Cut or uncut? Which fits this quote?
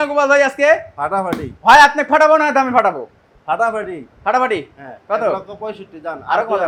uncut